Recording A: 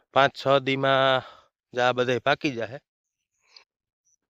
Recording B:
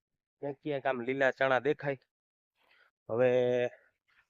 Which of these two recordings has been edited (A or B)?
A